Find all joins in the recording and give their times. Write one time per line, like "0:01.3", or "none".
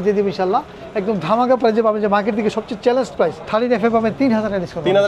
0:03.4